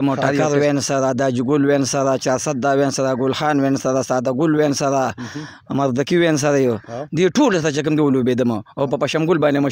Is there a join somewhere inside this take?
no; 0 cuts

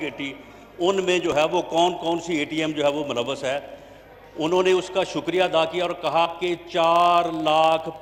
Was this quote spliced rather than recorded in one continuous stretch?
no; 0 cuts

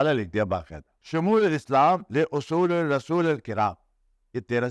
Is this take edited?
yes; 1 cut; at 0.9 s

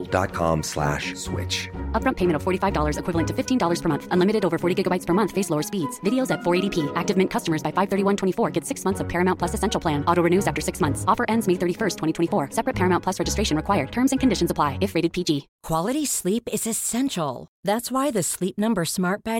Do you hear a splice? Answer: yes; 1 cut; at 15.5 s

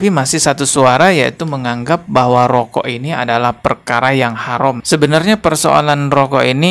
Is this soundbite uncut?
no; 1 cut; at 4.8 s

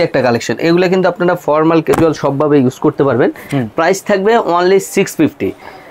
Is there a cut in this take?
no; 0 cuts

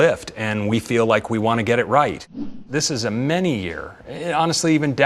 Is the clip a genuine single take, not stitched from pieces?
no; 1 cut; at 2.6 s

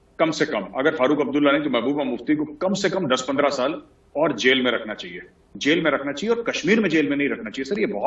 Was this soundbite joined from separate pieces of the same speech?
yes; 1 cut; at 5.5 s

